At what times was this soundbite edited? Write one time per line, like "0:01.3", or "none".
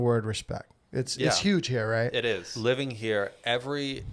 0:02.5

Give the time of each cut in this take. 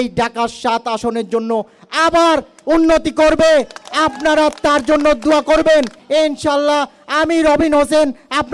0:06.0

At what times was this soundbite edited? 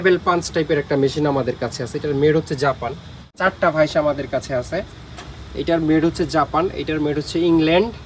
0:03.3

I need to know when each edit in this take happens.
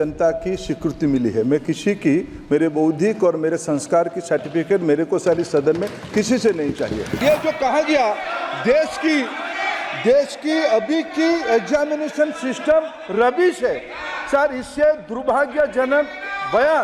0:07.1

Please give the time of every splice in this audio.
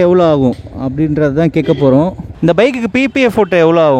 0:02.2

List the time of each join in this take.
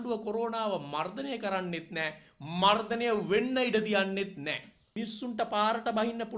0:05.0

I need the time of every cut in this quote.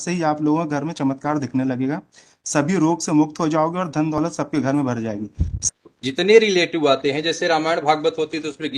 0:05.5

